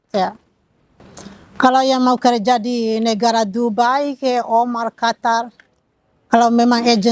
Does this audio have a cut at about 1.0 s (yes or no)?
yes